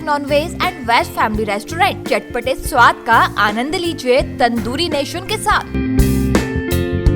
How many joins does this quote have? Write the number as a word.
zero